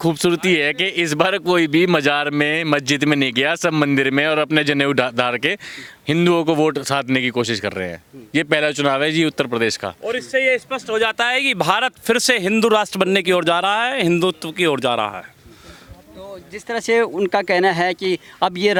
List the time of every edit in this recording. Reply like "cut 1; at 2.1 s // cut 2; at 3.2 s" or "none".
none